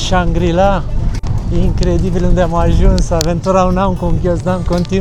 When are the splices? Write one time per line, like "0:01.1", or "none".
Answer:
none

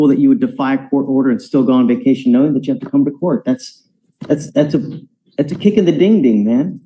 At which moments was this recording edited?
none

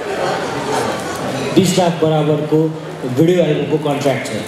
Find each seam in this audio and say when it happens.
none

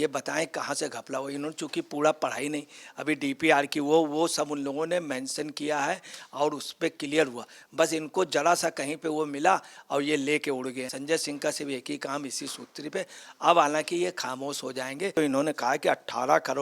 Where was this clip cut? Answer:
0:15.2

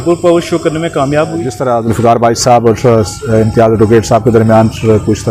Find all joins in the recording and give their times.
0:01.6

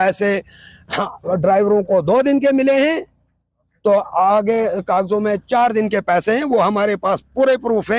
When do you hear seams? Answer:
none

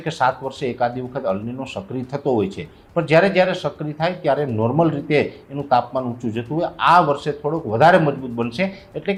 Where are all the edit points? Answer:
none

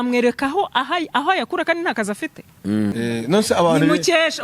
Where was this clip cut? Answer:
0:02.9

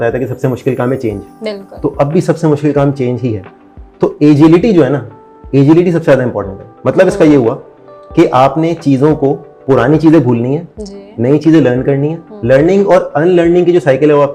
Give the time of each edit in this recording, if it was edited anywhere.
none

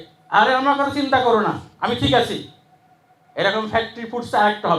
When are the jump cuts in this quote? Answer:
none

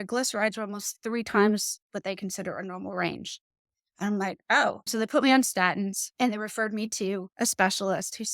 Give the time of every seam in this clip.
0:04.9
0:06.0
0:07.3

